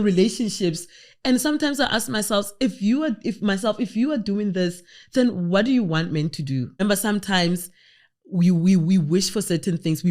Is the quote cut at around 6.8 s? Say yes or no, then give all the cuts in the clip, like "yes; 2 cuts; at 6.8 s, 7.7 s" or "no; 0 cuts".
yes; 1 cut; at 6.8 s